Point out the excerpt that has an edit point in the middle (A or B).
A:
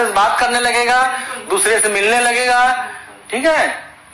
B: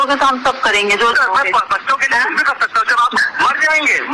B